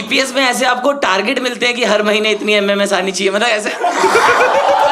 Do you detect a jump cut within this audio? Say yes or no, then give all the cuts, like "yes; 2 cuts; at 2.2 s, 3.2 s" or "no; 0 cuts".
no; 0 cuts